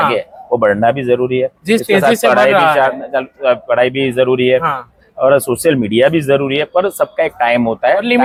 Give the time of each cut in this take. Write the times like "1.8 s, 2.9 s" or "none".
none